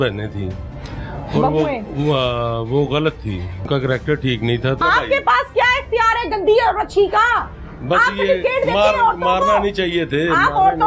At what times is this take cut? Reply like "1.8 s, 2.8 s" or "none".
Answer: 3.7 s, 4.8 s